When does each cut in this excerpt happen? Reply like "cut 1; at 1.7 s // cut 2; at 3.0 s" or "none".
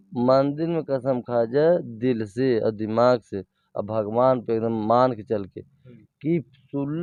none